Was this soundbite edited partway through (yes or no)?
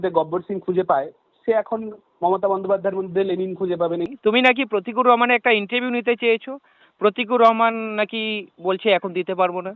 yes